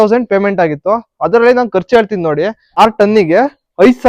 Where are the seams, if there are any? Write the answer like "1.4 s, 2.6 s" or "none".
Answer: 2.7 s